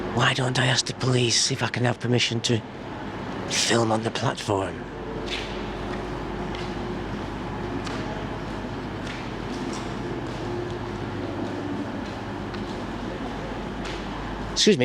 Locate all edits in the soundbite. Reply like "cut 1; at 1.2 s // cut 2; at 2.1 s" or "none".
none